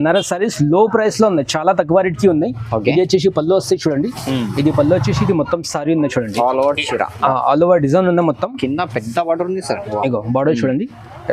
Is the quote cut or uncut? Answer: uncut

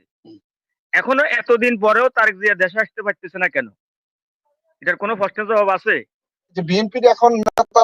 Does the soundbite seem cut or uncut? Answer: cut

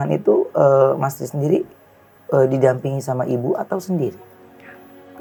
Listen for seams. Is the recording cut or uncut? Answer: uncut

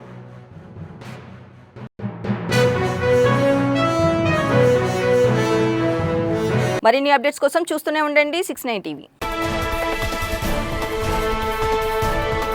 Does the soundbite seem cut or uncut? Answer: uncut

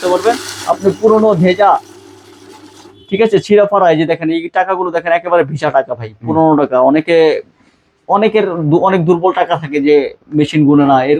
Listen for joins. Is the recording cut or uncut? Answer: uncut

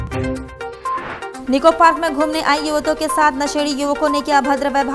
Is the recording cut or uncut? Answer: uncut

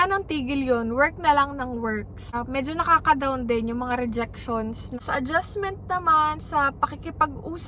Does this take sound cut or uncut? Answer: cut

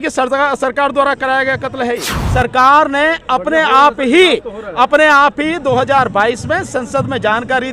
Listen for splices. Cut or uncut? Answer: cut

